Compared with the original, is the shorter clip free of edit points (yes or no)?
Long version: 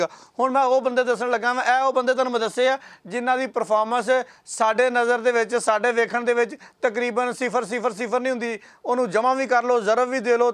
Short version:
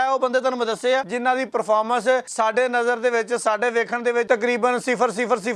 no